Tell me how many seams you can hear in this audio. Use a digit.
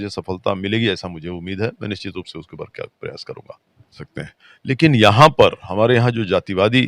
1